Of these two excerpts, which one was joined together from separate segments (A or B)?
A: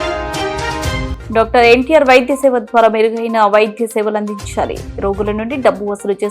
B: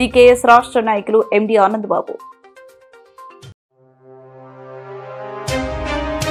A